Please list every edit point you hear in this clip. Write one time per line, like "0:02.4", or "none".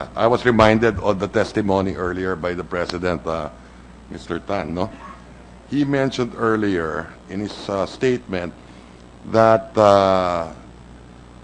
0:09.7